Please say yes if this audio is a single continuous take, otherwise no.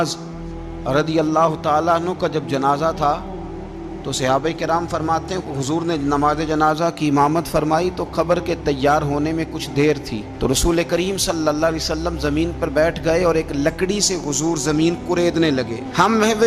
yes